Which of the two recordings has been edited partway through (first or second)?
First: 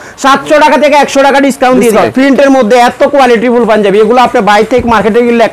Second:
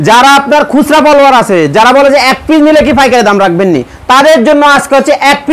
first